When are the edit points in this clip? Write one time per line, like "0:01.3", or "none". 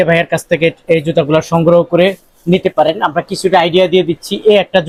none